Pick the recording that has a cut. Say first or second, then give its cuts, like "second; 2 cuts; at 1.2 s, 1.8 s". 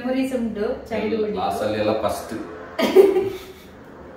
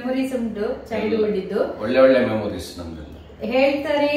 first; 1 cut; at 1.4 s